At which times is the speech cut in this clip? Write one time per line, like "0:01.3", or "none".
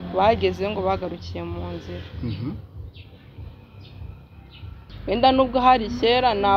0:04.8